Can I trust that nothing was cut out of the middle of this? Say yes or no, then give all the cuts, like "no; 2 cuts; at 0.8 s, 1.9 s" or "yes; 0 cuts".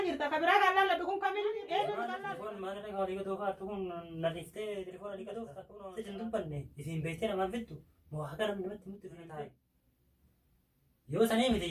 no; 3 cuts; at 2.4 s, 5.6 s, 9.4 s